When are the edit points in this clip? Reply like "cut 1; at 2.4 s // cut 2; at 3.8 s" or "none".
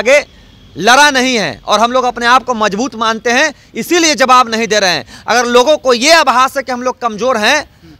none